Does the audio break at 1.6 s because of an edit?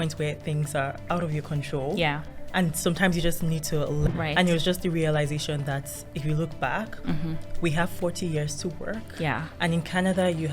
no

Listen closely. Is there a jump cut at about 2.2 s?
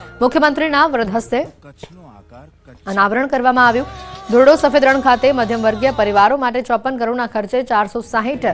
no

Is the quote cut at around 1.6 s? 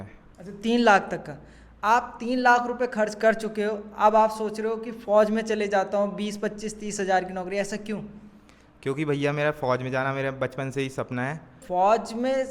no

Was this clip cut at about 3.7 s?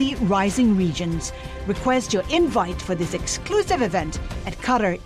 no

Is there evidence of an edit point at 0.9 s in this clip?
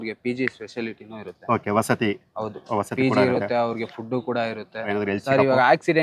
no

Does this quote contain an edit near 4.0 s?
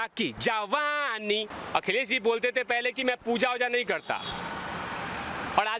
no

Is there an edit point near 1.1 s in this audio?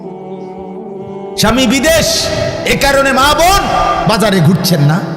yes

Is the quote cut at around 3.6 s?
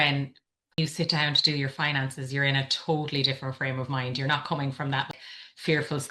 no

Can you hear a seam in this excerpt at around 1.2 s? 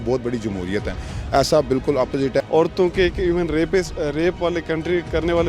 no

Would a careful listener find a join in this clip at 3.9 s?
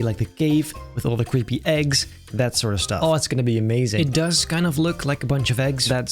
yes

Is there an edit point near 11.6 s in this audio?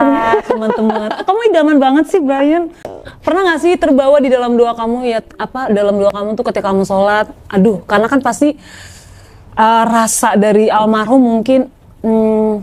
no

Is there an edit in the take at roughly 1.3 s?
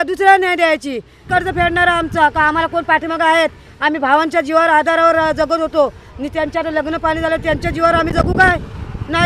yes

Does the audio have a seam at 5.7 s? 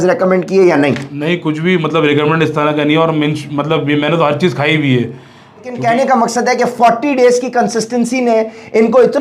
yes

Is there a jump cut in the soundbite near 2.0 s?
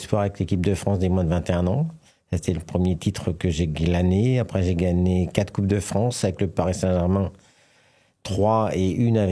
no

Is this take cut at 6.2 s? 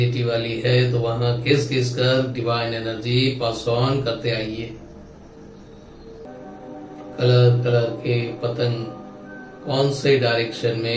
yes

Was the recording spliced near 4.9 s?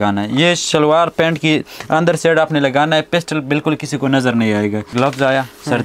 yes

